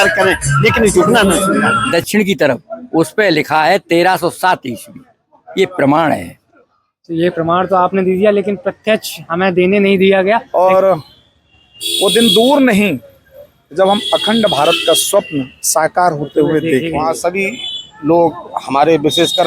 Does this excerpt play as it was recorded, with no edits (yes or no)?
no